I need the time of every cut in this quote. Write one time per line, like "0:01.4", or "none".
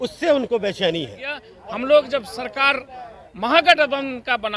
0:01.5